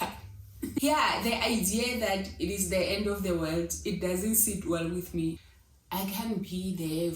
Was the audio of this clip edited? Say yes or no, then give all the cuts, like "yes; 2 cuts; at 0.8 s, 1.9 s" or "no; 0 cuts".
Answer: yes; 2 cuts; at 0.8 s, 5.4 s